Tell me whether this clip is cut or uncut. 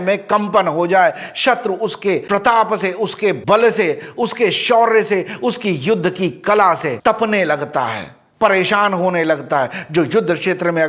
uncut